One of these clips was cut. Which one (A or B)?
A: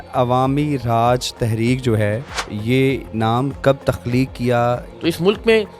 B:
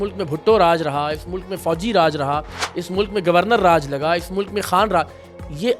A